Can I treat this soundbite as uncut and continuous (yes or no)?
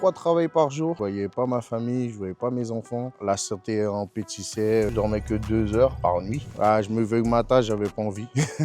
no